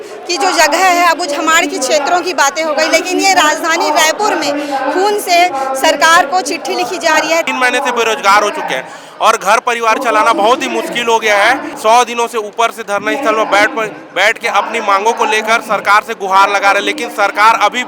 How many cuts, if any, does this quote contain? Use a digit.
2